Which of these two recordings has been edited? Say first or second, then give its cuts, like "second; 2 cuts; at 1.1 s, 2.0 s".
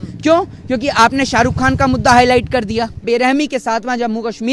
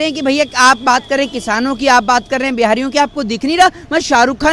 first; 1 cut; at 3.0 s